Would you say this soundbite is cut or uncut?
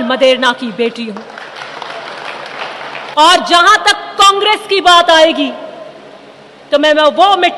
cut